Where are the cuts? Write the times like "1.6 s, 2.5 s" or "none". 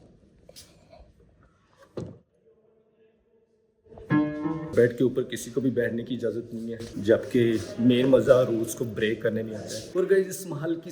4.7 s, 9.8 s